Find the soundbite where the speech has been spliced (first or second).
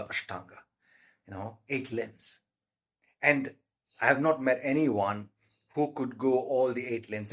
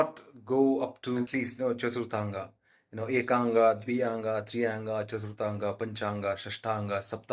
second